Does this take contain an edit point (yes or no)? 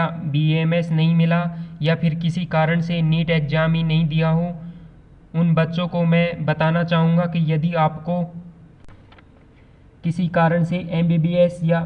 yes